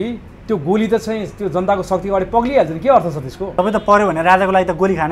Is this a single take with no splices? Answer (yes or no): no